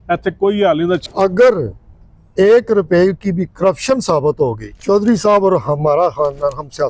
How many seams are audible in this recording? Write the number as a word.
two